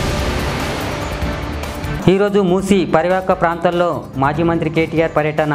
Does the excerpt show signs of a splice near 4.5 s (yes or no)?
no